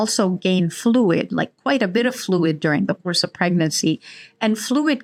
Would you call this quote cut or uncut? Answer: uncut